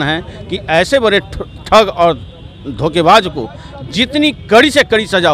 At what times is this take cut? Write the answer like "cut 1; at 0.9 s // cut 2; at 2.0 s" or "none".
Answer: none